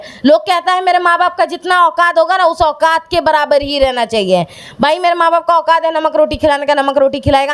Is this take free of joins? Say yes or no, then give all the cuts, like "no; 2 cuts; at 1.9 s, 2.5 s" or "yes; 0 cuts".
yes; 0 cuts